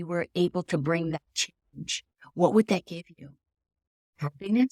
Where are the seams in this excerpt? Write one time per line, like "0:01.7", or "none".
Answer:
none

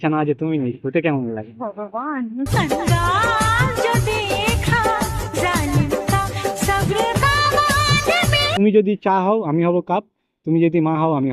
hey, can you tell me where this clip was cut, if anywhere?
0:08.5

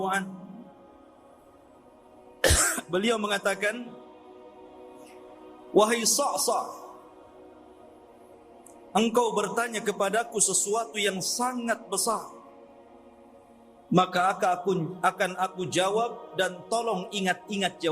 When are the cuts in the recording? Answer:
0:01.0
0:02.4
0:04.3
0:05.7
0:07.0
0:08.9

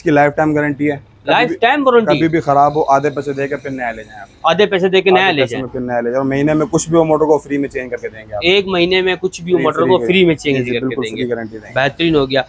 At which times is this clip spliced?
none

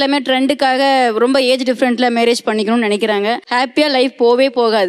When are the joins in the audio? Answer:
0:03.4

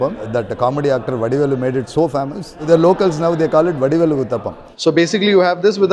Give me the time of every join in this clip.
none

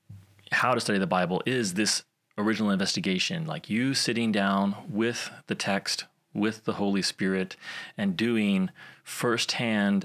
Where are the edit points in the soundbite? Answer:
none

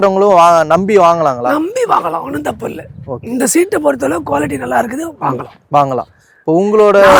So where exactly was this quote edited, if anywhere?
none

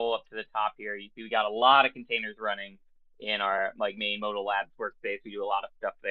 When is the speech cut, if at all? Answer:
none

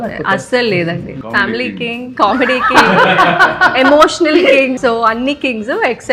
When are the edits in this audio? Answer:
0:01.2
0:04.8

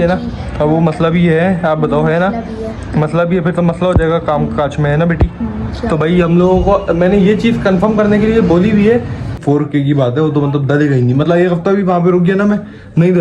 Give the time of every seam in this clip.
0:09.3

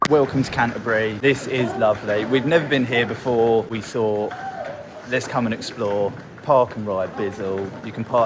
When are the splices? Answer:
0:01.2
0:03.8

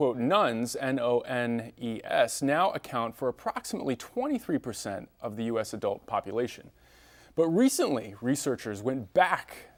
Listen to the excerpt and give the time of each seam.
none

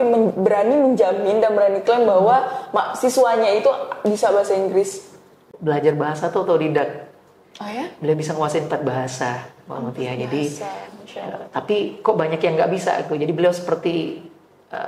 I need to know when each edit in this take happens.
0:05.5

